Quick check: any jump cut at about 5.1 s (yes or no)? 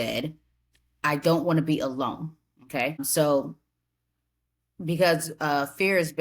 no